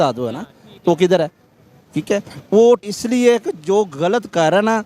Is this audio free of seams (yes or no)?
no